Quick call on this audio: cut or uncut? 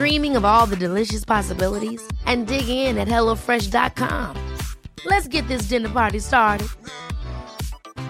uncut